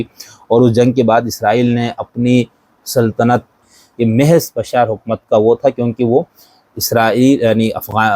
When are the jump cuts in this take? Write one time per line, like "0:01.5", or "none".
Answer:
0:03.6